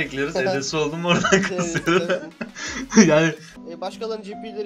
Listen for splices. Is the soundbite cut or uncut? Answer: cut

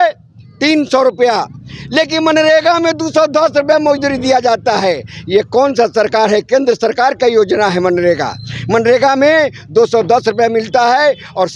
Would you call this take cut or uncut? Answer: uncut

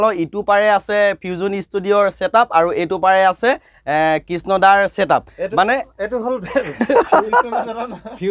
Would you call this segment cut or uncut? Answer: uncut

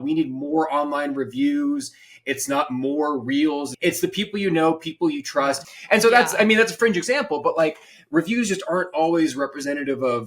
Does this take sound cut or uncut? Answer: cut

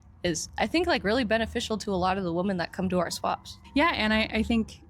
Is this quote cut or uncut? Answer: cut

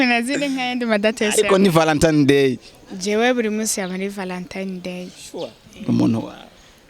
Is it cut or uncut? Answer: uncut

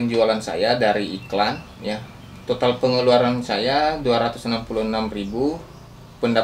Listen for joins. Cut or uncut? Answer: uncut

